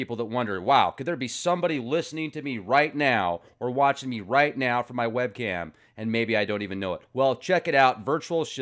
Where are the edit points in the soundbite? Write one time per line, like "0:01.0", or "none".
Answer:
0:02.6